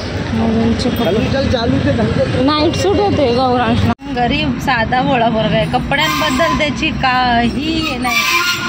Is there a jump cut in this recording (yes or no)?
yes